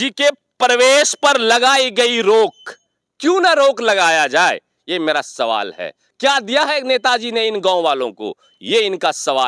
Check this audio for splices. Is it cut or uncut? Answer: uncut